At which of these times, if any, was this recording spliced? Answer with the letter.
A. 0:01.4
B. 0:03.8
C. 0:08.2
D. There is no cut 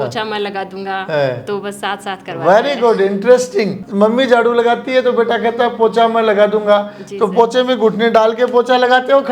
B